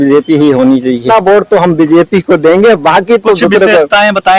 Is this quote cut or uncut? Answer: cut